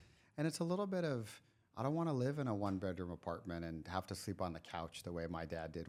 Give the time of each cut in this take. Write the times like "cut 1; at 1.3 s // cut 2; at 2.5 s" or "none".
none